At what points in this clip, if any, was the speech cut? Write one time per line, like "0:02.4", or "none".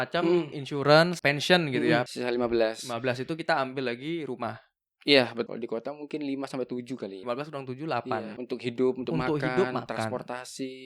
0:01.1
0:02.1
0:05.5
0:07.2
0:08.4

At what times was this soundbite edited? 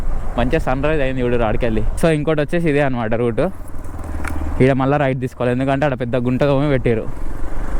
0:02.0

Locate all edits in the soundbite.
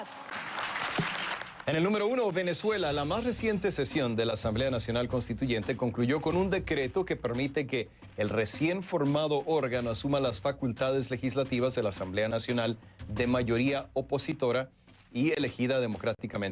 0:01.4

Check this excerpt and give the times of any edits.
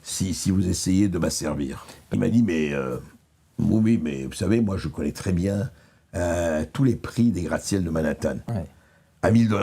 0:02.1

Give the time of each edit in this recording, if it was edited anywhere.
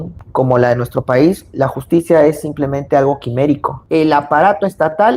0:03.8

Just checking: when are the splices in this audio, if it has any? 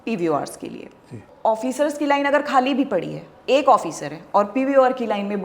0:01.2

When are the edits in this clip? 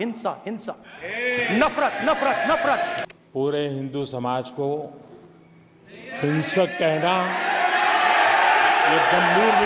0:03.1

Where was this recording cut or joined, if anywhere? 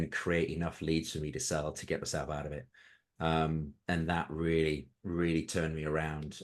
none

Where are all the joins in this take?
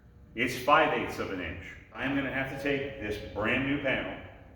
0:02.0

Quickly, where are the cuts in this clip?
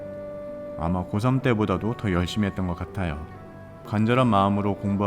0:03.9

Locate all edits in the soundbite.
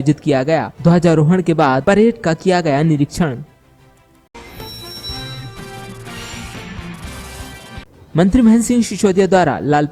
0:04.3
0:07.9

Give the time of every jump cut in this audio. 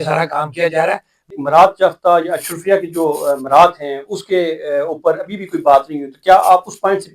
0:01.3

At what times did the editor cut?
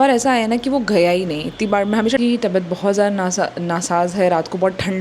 0:02.2

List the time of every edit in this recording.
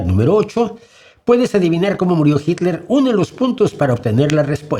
none

